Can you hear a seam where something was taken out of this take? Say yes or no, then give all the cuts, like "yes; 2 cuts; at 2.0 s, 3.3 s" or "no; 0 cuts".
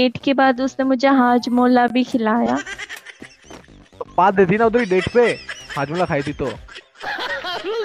no; 0 cuts